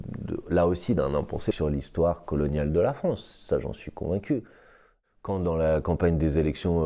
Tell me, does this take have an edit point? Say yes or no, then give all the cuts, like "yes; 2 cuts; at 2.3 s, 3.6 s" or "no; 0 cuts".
yes; 2 cuts; at 1.5 s, 4.9 s